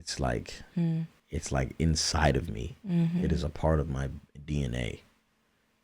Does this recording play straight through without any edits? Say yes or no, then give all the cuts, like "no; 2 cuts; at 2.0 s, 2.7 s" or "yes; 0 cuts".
no; 1 cut; at 1.2 s